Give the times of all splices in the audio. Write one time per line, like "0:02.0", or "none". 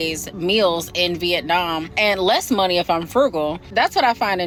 none